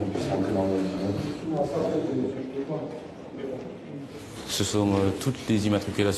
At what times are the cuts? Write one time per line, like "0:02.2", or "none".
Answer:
none